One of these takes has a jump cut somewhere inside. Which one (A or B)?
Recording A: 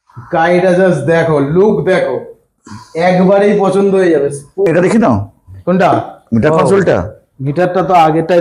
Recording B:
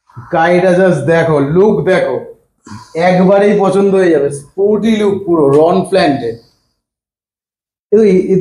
A